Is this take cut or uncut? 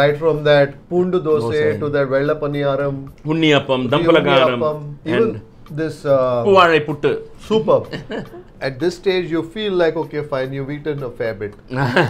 uncut